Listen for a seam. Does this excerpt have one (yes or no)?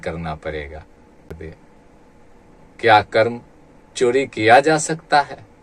yes